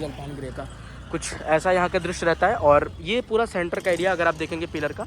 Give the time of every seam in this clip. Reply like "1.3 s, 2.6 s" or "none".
none